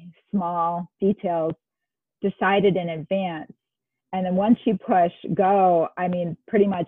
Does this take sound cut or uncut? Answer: uncut